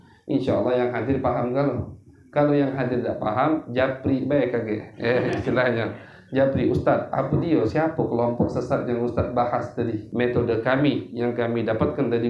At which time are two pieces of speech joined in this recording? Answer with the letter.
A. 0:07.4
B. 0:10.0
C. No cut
B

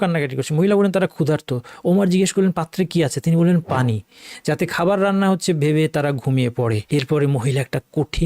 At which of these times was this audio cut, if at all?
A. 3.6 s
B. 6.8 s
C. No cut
B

